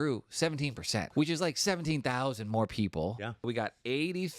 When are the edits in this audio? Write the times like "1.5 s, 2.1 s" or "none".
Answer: 1.1 s, 3.5 s

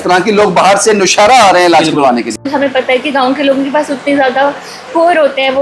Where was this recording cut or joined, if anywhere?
2.5 s

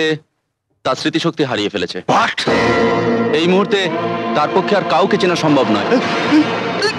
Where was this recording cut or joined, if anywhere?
none

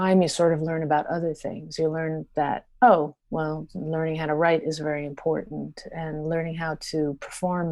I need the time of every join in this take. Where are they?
none

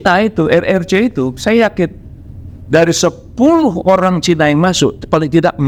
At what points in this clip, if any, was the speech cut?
none

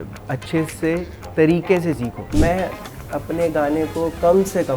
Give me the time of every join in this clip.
2.3 s

